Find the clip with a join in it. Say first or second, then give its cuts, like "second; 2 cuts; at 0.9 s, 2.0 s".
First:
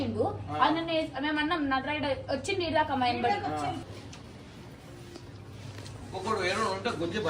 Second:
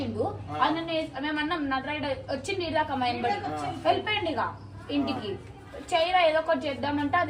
first; 1 cut; at 3.8 s